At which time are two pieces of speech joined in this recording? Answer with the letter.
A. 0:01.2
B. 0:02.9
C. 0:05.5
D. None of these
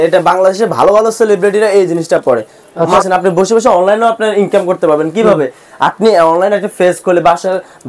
B